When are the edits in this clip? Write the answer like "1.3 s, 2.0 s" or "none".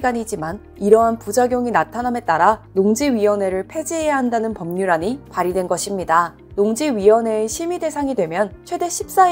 6.4 s